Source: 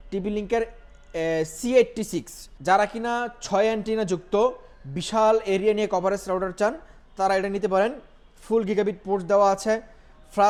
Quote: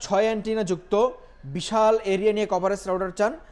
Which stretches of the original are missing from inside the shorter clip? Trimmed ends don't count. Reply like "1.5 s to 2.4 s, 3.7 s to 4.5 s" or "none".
none